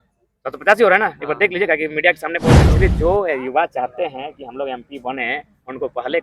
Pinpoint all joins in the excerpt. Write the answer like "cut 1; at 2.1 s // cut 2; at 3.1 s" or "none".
cut 1; at 2.6 s